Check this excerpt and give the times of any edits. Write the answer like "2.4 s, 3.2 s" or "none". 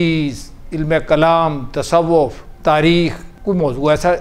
2.5 s, 3.3 s

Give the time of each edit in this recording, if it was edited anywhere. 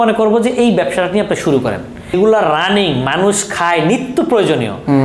2.1 s

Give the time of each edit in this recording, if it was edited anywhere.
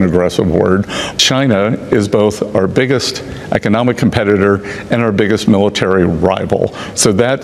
1.0 s

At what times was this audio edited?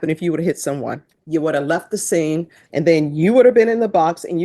1.1 s, 2.6 s

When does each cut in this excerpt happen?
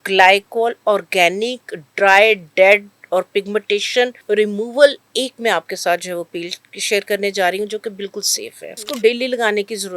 4.2 s, 8.9 s

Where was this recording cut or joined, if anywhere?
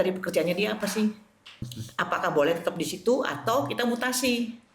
1.8 s

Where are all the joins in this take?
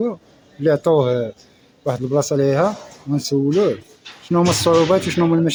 none

